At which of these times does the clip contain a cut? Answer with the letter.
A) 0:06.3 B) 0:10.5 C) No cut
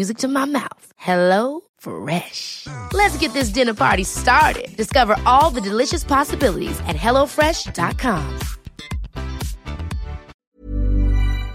B